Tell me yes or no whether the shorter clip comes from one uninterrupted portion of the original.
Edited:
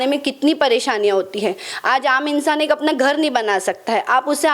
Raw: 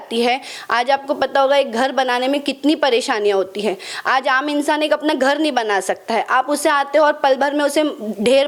yes